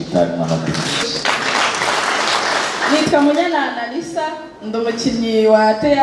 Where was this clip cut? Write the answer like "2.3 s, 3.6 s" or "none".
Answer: 1.0 s